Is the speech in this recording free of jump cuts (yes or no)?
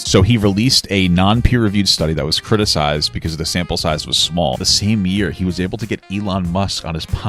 no